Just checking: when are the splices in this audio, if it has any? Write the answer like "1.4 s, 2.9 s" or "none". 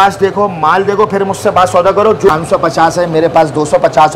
2.3 s